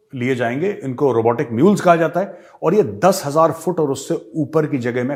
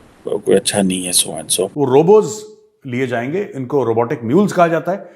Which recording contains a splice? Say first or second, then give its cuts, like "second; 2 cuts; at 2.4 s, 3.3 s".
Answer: second; 1 cut; at 1.6 s